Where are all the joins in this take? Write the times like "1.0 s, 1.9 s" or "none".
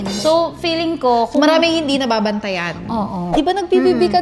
3.3 s